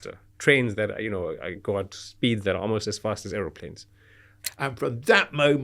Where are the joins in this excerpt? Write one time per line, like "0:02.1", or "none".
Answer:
0:02.0
0:04.4